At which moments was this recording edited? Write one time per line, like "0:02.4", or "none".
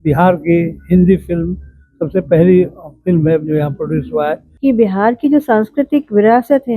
0:04.4